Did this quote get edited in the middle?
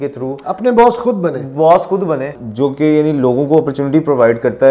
yes; 1 cut; at 2.4 s

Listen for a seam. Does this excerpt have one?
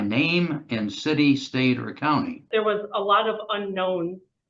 yes; 1 cut; at 2.4 s

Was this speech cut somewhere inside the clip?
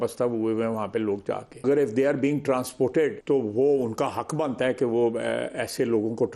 yes; 2 cuts; at 1.6 s, 3.2 s

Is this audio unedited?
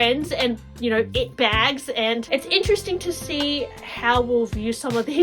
no; 1 cut; at 2.3 s

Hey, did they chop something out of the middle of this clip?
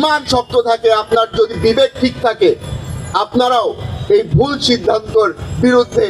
no; 0 cuts

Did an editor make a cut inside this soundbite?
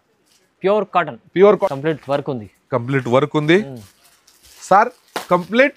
yes; 1 cut; at 1.7 s

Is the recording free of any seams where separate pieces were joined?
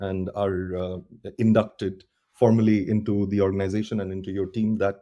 yes; 0 cuts

